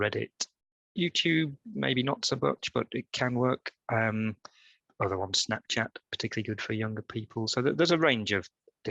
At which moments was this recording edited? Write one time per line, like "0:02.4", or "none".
none